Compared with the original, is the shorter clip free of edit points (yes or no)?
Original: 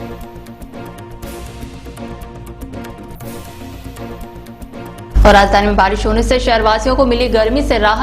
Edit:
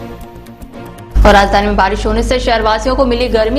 no